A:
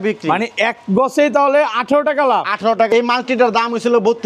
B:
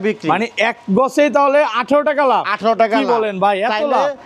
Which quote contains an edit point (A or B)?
A